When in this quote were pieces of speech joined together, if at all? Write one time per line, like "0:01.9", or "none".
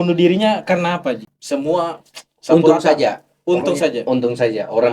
0:01.2